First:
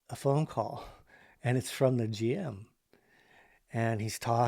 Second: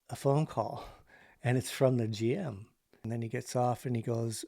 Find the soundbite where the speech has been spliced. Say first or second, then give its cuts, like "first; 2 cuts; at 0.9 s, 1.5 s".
second; 1 cut; at 2.9 s